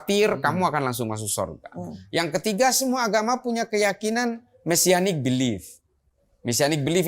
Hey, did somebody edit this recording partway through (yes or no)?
no